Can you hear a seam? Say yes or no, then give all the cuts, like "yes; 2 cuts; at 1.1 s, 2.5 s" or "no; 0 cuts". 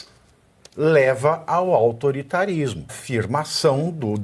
yes; 1 cut; at 3.0 s